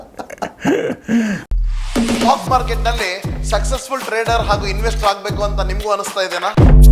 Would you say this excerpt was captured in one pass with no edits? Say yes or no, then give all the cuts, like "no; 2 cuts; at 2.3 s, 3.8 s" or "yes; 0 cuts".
no; 1 cut; at 1.4 s